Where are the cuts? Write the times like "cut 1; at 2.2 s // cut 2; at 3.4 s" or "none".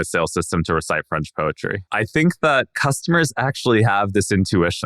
cut 1; at 1.8 s // cut 2; at 2.8 s